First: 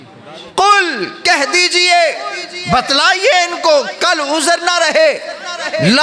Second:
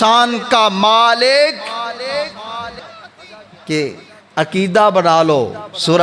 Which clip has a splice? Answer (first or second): second